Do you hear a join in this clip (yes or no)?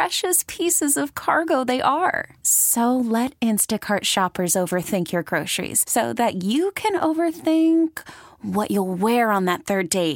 no